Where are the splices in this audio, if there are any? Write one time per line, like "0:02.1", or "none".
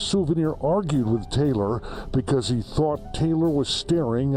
none